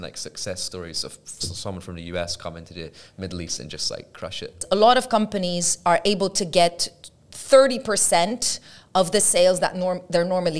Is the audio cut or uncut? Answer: cut